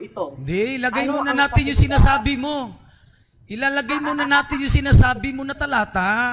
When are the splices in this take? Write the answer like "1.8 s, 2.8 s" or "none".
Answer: none